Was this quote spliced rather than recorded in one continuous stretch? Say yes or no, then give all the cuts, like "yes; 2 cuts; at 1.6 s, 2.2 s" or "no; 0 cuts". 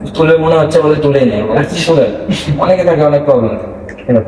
no; 0 cuts